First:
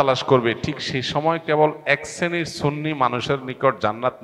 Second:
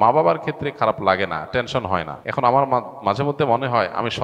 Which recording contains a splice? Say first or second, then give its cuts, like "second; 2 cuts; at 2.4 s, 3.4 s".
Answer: second; 1 cut; at 2.2 s